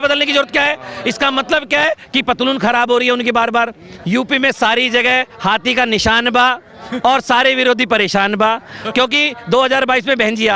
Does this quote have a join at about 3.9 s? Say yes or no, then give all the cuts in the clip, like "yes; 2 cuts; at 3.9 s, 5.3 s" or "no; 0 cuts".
yes; 1 cut; at 3.9 s